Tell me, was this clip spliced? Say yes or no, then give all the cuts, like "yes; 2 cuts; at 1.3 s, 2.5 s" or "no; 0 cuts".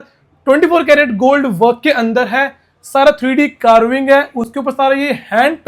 no; 0 cuts